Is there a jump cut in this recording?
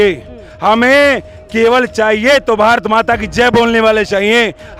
no; 0 cuts

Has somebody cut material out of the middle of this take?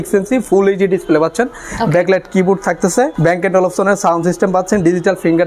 yes; 1 cut; at 3.1 s

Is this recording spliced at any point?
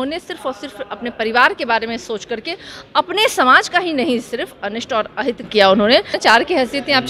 yes; 1 cut; at 6.2 s

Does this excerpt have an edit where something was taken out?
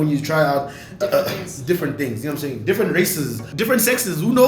yes; 1 cut; at 3.4 s

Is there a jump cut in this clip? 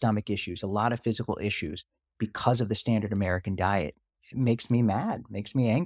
no; 0 cuts

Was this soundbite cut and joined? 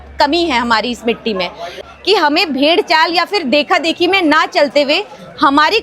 yes; 1 cut; at 1.8 s

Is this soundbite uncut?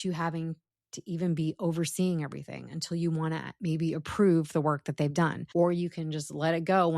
no; 1 cut; at 5.4 s

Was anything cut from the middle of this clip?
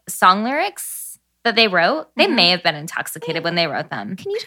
no; 0 cuts

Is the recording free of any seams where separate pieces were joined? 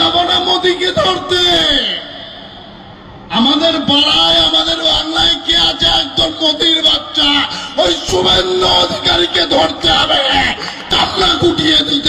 no; 1 cut; at 10.7 s

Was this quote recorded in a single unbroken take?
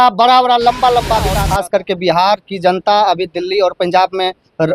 no; 1 cut; at 1.4 s

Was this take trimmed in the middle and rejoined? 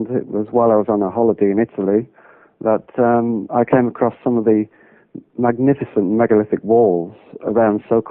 yes; 1 cut; at 4.2 s

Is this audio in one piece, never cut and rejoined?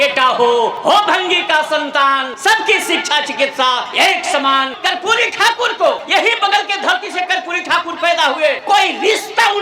no; 6 cuts; at 0.8 s, 2.3 s, 3.9 s, 4.7 s, 6.0 s, 8.6 s

